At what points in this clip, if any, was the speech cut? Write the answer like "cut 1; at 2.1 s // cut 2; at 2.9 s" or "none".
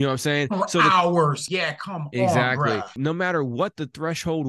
cut 1; at 1.5 s // cut 2; at 3.0 s